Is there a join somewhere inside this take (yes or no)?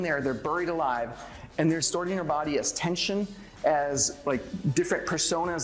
yes